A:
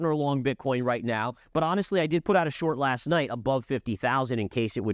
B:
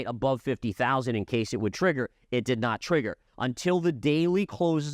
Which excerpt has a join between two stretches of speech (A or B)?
B